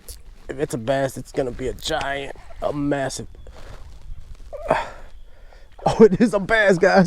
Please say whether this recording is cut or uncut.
uncut